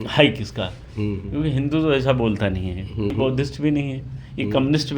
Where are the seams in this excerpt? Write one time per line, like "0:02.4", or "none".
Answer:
0:02.9